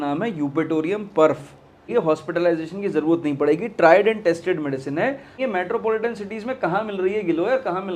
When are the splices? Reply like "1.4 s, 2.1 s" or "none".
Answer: 1.9 s, 5.4 s